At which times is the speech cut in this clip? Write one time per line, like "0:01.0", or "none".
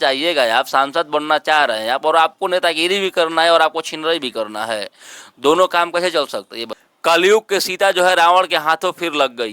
0:06.9